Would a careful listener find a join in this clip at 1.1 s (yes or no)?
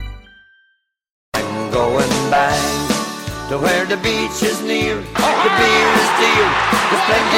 yes